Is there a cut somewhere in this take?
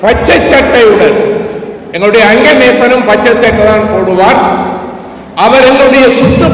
no; 0 cuts

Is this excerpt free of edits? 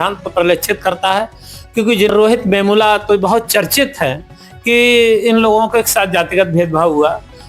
no; 1 cut; at 2.1 s

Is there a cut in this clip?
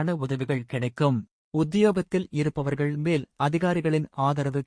yes; 1 cut; at 1.4 s

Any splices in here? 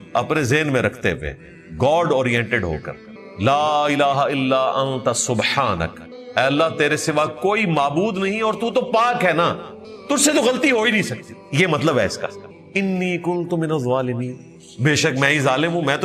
no; 0 cuts

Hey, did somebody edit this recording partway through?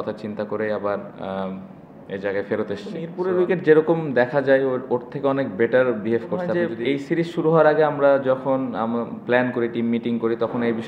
yes; 2 cuts; at 3.1 s, 6.5 s

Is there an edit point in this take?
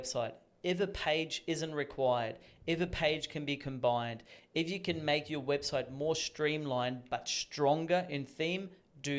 no; 0 cuts

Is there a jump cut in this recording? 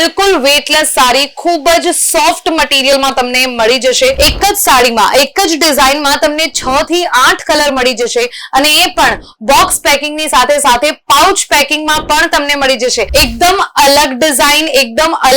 yes; 2 cuts; at 4.2 s, 13.1 s

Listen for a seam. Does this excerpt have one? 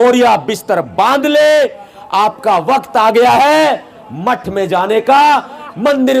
no; 0 cuts

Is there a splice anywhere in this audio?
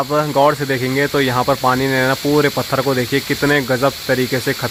no; 0 cuts

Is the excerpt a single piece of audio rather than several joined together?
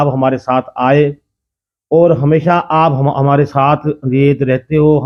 yes; 0 cuts

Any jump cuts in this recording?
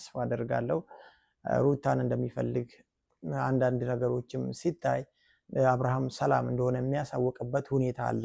no; 0 cuts

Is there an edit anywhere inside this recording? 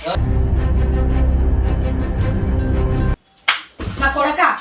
yes; 1 cut; at 3.2 s

